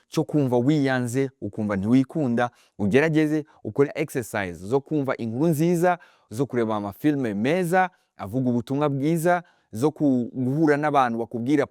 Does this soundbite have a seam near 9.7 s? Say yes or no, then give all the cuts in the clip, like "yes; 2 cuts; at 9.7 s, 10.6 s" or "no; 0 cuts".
no; 1 cut; at 3.9 s